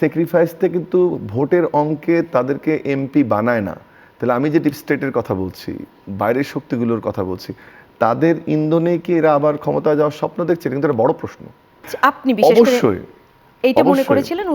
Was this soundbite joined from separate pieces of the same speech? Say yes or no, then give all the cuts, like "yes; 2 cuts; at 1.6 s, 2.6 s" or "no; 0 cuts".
yes; 1 cut; at 11.8 s